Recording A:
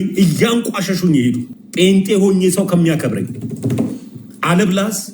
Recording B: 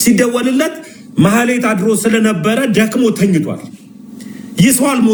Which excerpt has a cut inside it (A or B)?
A